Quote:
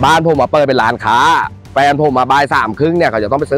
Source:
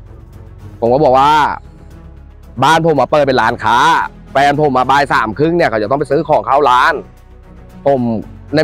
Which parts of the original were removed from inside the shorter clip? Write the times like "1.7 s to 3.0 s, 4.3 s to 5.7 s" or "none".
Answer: none